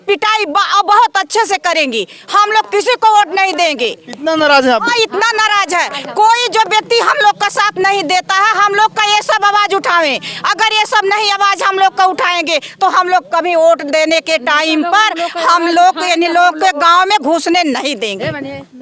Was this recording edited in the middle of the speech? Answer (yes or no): no